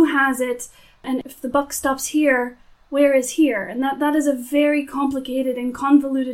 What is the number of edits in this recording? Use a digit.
1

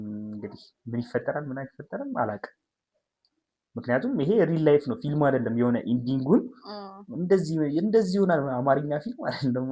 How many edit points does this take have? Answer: 0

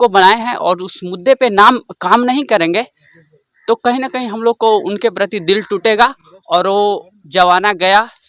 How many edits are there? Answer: 0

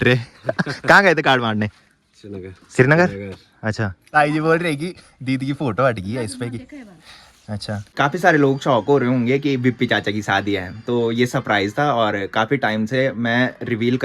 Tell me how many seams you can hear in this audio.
2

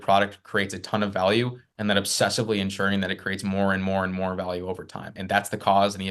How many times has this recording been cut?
1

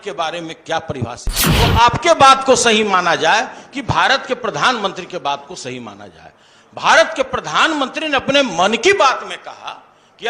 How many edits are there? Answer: 1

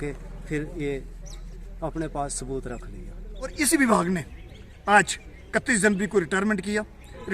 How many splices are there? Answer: 1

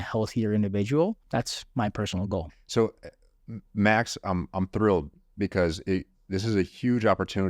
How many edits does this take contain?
1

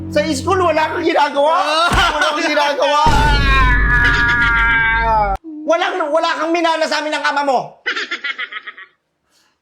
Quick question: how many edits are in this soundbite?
1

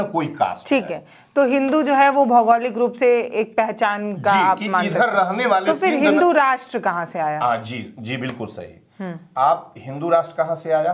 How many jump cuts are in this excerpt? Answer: 0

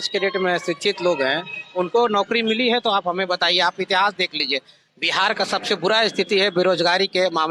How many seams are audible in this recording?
0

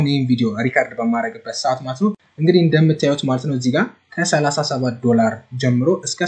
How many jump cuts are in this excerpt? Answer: 1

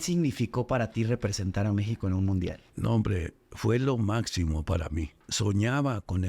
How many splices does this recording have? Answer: 2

